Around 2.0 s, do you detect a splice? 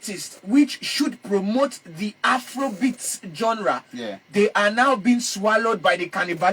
no; 0 cuts

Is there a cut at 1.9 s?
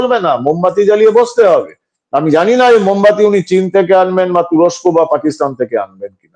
no; 0 cuts

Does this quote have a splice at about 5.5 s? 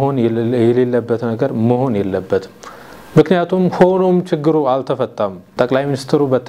yes; 1 cut; at 5.5 s

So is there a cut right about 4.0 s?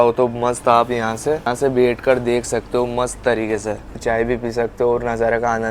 yes; 1 cut; at 4.0 s

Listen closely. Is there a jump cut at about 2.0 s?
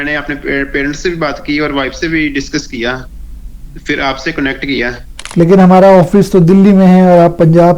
no; 1 cut; at 5.1 s

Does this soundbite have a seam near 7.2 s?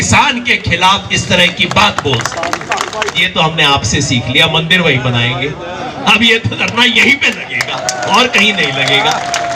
no; 1 cut; at 3.2 s

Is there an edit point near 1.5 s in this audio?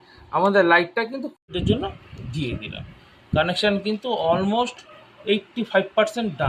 yes; 1 cut; at 1.5 s

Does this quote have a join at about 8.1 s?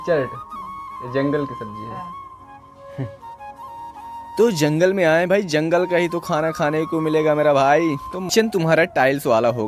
yes; 1 cut; at 8.1 s

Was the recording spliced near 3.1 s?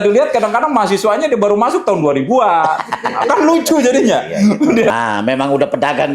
no; 1 cut; at 4.9 s

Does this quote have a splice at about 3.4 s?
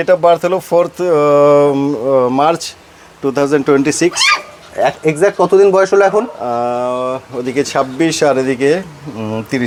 no; 0 cuts

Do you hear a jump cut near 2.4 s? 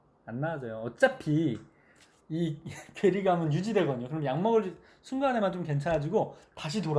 no; 0 cuts

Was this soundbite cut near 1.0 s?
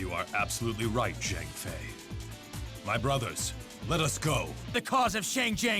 no; 1 cut; at 4.7 s

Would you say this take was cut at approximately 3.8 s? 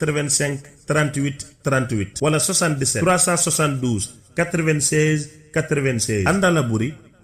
yes; 1 cut; at 3.8 s

